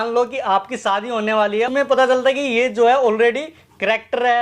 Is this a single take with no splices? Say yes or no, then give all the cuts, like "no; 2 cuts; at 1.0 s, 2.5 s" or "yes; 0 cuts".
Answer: no; 1 cut; at 1.7 s